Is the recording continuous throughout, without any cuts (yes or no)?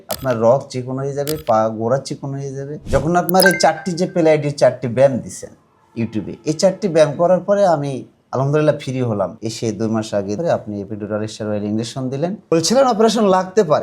no